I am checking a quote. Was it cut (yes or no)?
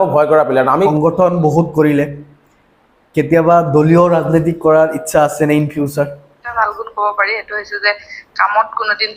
yes